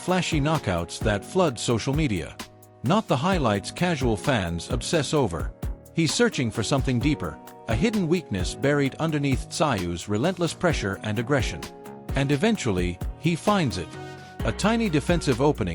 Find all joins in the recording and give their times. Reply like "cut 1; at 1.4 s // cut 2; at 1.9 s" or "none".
cut 1; at 13.4 s